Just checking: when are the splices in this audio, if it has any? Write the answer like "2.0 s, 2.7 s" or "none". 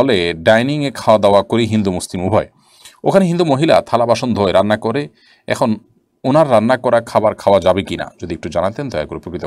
none